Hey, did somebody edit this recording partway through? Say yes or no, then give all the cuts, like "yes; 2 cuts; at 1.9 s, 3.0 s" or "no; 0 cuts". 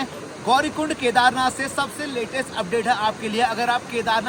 no; 0 cuts